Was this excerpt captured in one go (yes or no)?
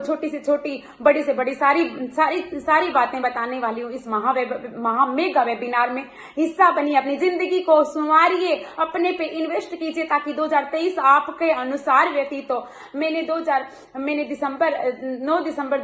yes